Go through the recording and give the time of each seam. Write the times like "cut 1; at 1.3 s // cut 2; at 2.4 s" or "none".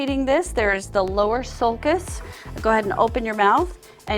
none